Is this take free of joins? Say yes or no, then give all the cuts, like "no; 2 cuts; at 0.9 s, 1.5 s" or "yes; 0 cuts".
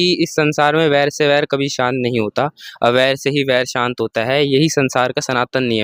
yes; 0 cuts